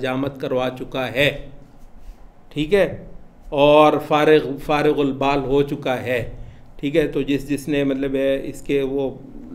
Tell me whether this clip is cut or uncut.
uncut